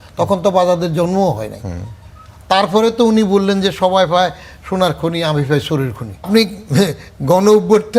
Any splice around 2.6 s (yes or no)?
no